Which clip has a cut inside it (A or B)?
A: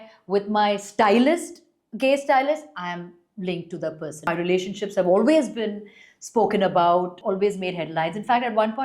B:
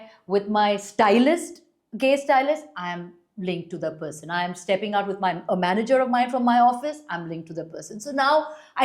A